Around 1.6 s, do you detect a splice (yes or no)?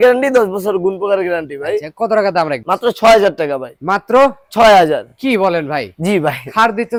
no